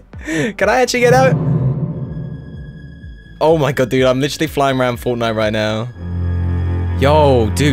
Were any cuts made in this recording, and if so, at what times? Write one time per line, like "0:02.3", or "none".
0:01.3
0:06.8